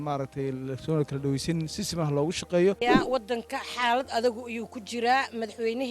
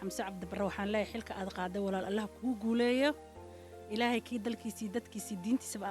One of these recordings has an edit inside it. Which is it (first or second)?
first